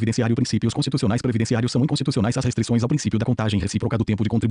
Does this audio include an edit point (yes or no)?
no